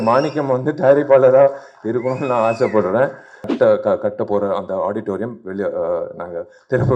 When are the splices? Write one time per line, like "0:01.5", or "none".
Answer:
0:03.5